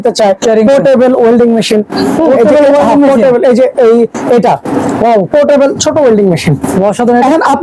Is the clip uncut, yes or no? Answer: yes